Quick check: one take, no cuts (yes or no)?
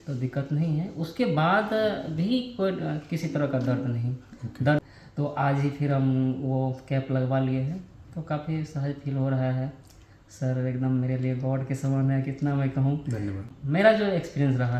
no